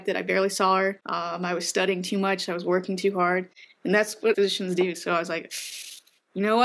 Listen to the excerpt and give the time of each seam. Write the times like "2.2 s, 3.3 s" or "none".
1.0 s, 4.3 s